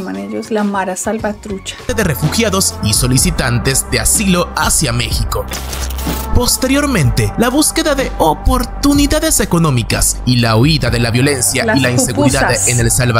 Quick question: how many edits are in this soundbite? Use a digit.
0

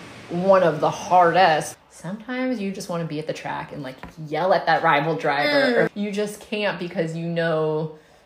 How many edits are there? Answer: 2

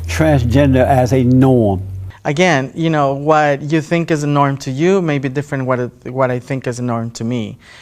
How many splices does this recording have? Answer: 0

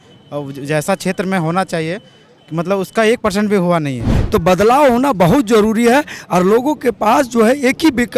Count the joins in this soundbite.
1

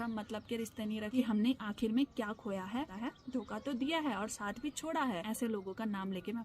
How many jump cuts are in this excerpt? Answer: 3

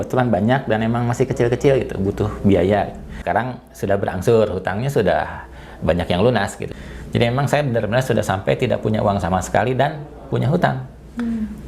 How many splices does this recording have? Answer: 2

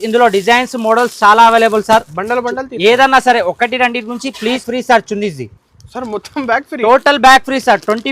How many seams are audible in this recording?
1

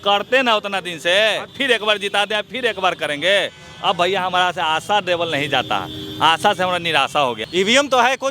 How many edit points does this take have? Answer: 2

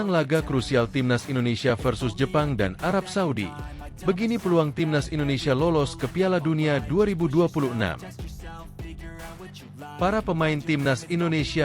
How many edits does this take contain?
2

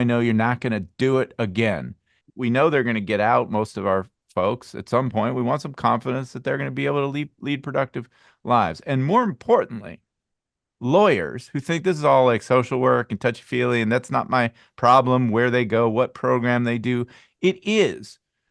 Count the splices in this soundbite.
1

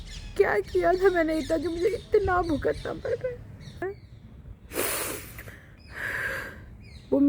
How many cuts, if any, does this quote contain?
1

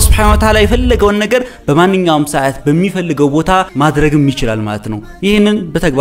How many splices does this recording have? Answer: 1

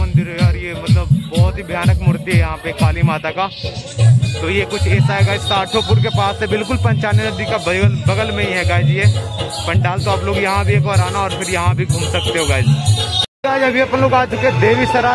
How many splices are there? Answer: 0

